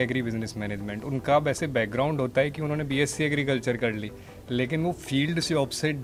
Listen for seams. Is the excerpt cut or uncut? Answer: uncut